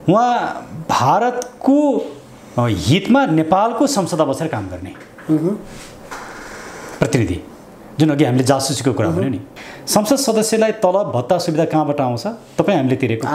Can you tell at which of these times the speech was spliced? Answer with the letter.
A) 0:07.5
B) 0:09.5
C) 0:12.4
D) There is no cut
B